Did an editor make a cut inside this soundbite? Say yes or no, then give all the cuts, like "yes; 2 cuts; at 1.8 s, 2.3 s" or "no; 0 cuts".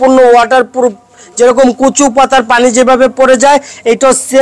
no; 0 cuts